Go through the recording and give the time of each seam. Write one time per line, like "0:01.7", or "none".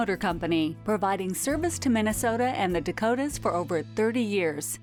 none

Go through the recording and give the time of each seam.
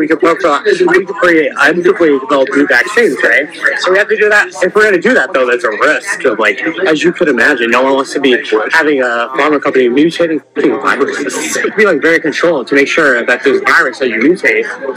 0:11.7

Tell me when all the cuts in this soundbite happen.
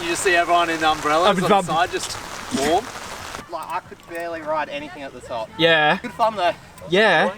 0:03.4
0:06.1

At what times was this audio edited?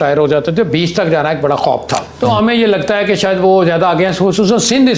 0:02.0

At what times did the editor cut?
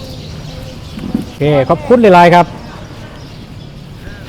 0:01.4

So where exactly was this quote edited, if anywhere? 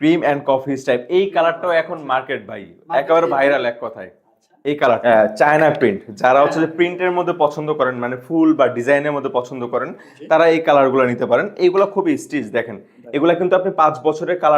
0:05.0

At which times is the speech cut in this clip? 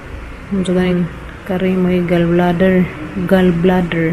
0:00.9

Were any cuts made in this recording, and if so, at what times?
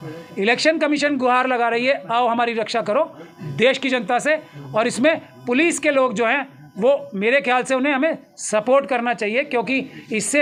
none

